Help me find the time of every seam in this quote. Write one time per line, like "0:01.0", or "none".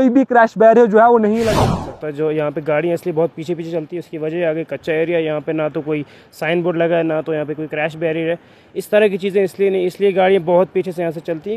0:01.5